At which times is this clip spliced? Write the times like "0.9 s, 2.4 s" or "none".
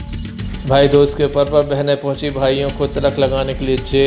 none